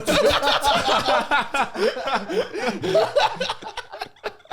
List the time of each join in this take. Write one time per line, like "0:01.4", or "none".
none